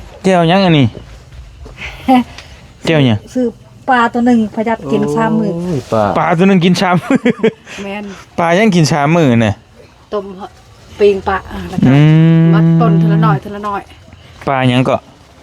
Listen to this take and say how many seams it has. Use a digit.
0